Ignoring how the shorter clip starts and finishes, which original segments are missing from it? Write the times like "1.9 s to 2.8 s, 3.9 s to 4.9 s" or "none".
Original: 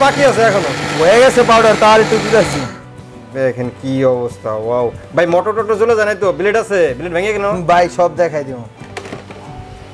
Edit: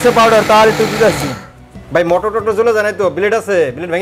3.1 s to 5.0 s